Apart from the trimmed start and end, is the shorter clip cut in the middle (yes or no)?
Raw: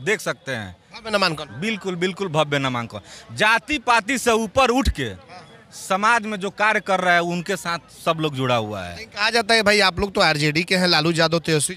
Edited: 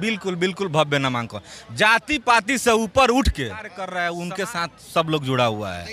yes